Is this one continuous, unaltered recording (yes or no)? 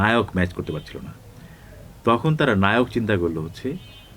yes